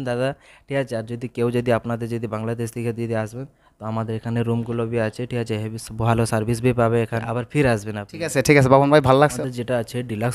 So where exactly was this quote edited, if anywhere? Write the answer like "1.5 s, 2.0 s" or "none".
7.2 s, 9.4 s